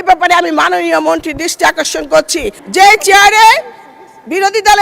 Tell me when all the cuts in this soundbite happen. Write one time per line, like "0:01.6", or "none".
0:02.6

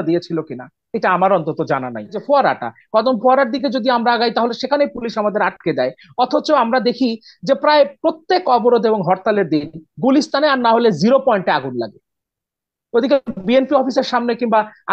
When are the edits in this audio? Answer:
0:02.2

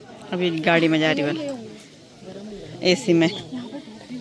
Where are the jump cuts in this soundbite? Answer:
none

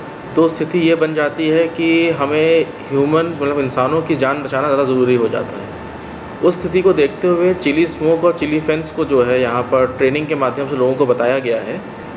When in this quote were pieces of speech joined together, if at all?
none

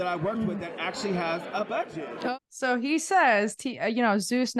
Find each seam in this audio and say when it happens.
0:02.4

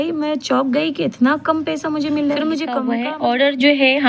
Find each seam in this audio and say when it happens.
0:02.9

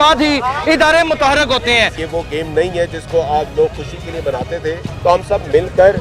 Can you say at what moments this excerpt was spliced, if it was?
0:02.0
0:04.9

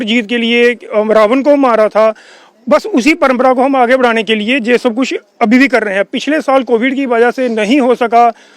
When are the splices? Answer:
none

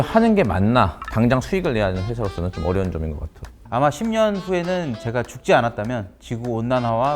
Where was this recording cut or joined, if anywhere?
0:01.0
0:03.5

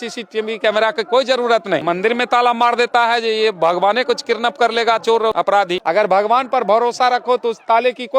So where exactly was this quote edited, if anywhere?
0:01.8
0:05.6

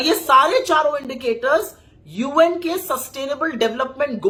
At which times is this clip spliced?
none

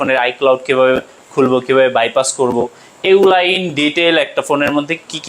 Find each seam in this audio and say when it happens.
none

